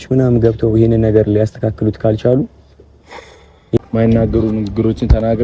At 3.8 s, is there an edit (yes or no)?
yes